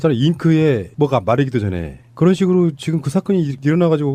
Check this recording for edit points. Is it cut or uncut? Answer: uncut